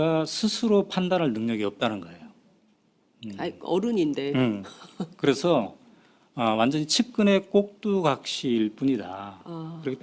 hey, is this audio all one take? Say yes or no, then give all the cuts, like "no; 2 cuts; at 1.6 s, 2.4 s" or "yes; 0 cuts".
no; 1 cut; at 2.9 s